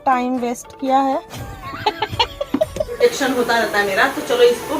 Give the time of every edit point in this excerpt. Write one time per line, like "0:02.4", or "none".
0:03.0